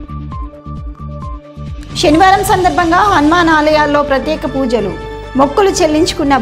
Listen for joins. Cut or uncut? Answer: uncut